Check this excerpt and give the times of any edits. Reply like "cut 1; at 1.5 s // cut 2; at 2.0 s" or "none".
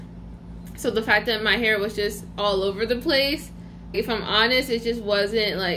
none